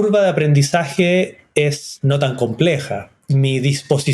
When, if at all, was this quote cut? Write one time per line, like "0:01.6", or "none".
0:01.9
0:03.1